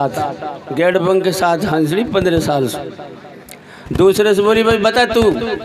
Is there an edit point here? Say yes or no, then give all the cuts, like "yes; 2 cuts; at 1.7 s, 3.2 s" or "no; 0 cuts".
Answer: no; 0 cuts